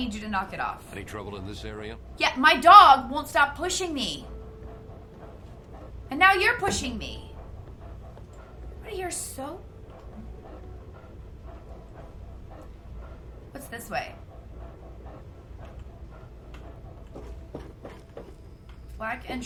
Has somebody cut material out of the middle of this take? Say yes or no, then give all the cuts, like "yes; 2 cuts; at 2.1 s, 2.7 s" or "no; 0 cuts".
no; 0 cuts